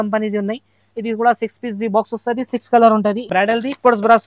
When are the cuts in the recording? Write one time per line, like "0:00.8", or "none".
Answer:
0:03.3